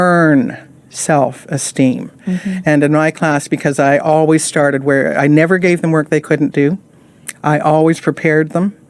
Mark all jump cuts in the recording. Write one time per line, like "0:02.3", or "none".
none

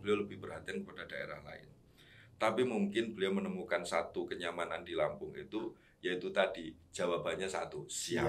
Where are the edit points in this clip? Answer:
none

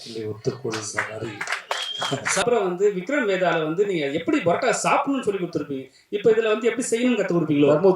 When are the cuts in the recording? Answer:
0:02.4

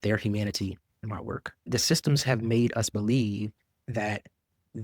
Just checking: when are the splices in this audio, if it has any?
0:01.7

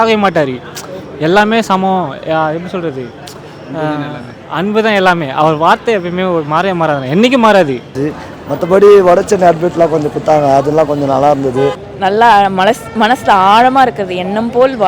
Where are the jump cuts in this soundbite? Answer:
0:08.0
0:11.8

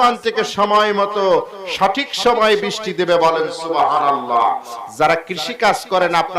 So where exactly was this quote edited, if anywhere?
0:04.7

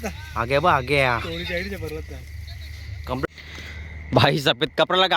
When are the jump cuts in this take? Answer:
0:03.2

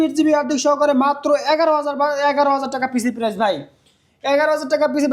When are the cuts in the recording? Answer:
none

